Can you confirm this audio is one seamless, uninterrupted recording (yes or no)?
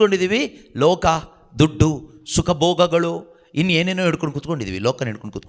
yes